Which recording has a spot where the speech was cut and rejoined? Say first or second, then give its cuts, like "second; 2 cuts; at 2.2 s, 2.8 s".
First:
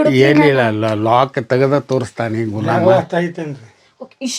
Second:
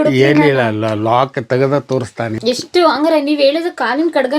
second; 1 cut; at 2.3 s